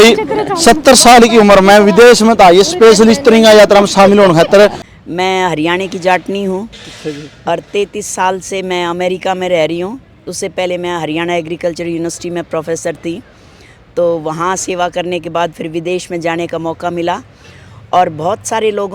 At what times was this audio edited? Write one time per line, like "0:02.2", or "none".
0:04.9